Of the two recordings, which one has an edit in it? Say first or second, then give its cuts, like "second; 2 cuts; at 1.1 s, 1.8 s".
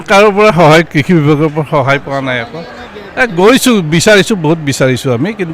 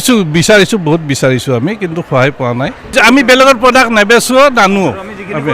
second; 1 cut; at 2.9 s